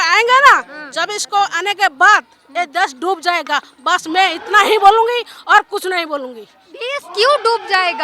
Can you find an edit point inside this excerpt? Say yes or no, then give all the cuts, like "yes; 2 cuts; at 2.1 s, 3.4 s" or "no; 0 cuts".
no; 0 cuts